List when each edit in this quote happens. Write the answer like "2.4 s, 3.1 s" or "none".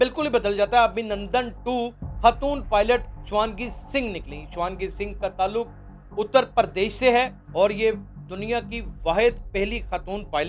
7.4 s

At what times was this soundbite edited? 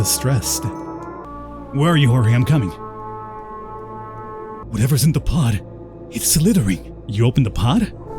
1.3 s, 4.5 s, 7.0 s

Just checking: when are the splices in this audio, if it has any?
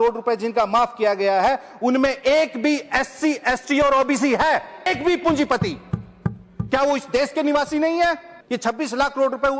4.9 s, 8.3 s

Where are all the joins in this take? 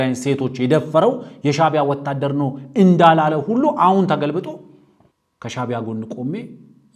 none

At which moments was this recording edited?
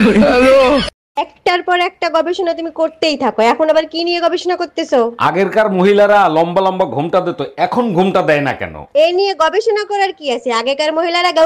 1.0 s

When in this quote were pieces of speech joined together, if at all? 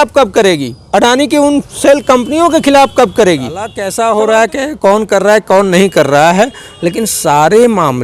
3.8 s

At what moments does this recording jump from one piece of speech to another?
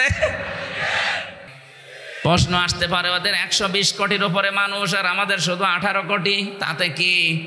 1.6 s

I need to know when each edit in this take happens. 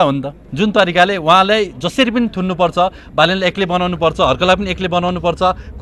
none

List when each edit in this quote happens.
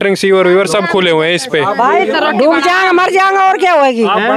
2.1 s

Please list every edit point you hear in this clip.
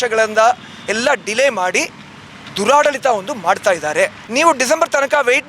4.2 s

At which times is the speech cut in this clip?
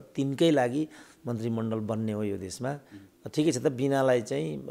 none

